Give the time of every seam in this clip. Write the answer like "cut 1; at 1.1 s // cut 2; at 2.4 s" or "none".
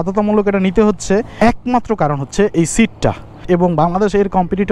cut 1; at 1.3 s // cut 2; at 3.3 s